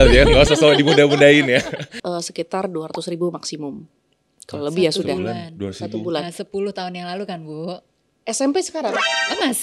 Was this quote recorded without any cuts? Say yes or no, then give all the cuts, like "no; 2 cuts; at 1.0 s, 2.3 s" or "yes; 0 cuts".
no; 1 cut; at 1.9 s